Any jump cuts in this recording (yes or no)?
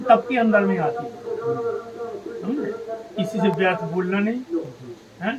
no